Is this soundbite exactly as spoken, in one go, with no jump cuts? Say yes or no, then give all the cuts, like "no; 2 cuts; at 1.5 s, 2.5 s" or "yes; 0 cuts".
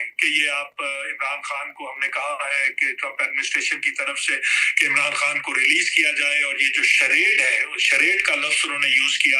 yes; 0 cuts